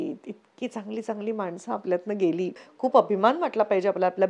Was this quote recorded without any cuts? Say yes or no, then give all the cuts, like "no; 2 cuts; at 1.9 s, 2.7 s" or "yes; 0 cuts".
no; 1 cut; at 2.6 s